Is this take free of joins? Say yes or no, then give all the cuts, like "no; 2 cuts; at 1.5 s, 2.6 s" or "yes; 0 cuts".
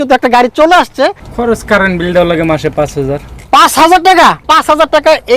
no; 2 cuts; at 1.3 s, 4.4 s